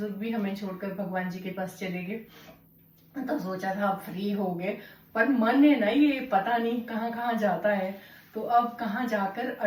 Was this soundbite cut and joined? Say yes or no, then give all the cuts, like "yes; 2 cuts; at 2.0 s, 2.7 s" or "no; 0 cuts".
no; 0 cuts